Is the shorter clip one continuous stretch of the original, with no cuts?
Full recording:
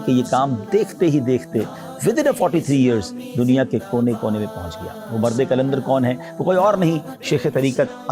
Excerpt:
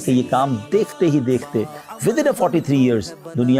yes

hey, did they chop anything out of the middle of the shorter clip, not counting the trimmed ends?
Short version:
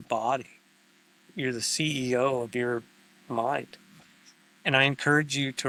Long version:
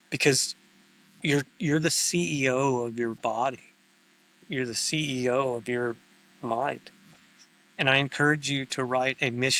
no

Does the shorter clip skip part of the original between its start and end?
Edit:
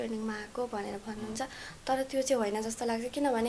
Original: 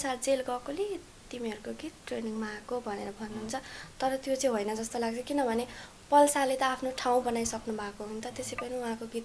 no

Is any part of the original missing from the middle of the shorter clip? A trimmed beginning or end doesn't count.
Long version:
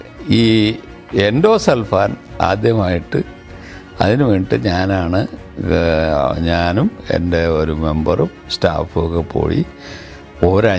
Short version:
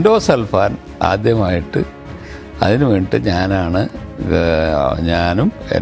no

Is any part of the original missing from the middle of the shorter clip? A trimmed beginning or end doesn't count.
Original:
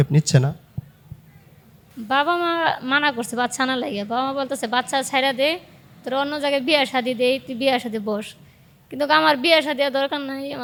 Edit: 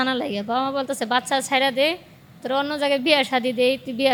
no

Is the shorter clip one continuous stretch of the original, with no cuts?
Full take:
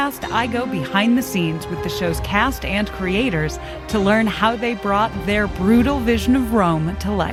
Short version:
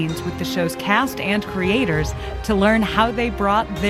yes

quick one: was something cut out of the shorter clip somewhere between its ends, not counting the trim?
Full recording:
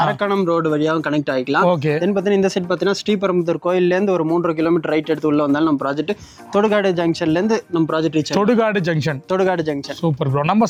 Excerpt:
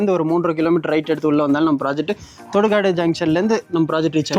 no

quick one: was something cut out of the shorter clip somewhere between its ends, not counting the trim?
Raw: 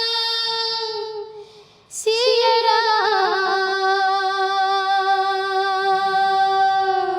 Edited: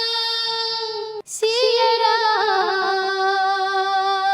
yes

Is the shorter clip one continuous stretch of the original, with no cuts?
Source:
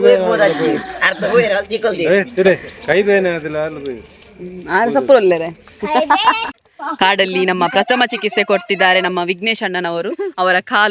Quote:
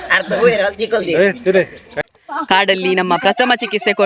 no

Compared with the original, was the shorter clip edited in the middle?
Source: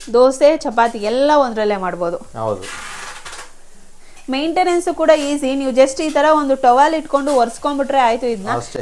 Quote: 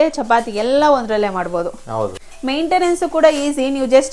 yes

